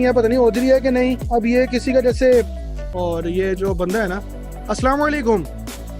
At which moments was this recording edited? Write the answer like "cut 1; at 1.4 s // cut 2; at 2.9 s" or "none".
cut 1; at 2.8 s

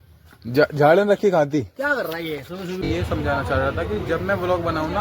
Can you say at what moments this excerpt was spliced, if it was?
cut 1; at 2.8 s

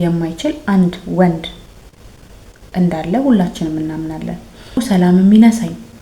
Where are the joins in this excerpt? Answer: cut 1; at 4.8 s

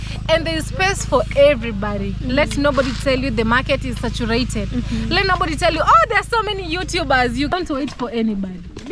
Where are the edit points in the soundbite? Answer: cut 1; at 7.6 s

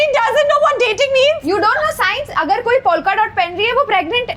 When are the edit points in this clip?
none

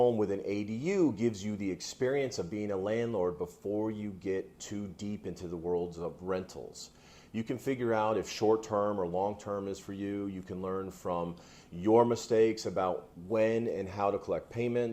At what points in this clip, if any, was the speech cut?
none

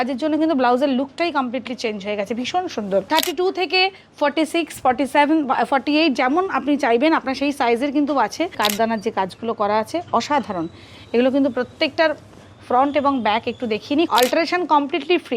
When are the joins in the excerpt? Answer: cut 1; at 3.1 s // cut 2; at 8.6 s // cut 3; at 14.1 s

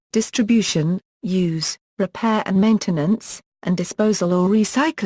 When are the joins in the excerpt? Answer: cut 1; at 1.1 s

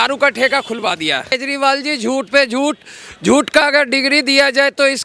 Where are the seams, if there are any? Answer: cut 1; at 1.4 s

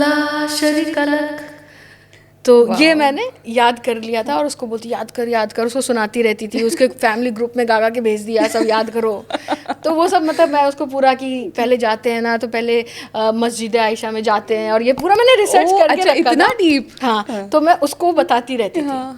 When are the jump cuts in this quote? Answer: none

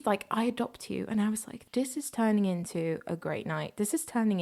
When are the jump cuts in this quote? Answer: cut 1; at 1.6 s

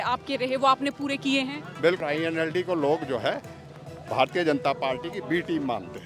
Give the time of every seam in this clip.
cut 1; at 2.0 s

